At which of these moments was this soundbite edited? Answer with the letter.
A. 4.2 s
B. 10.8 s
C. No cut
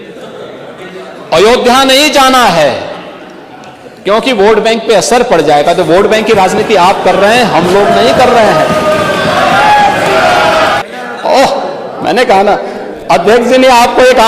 B